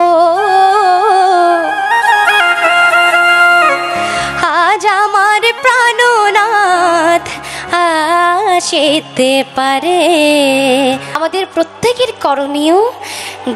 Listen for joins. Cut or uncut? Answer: cut